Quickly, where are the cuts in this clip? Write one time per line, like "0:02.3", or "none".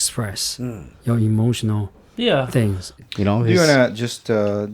0:03.0